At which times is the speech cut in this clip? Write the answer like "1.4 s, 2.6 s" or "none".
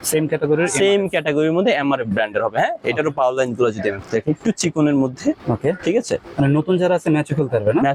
none